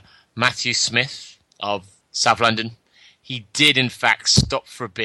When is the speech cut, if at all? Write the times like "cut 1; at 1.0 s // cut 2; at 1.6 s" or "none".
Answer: cut 1; at 1.9 s